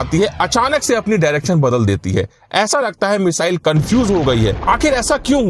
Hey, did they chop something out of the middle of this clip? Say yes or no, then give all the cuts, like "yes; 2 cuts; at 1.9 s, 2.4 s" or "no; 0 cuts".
yes; 1 cut; at 4.6 s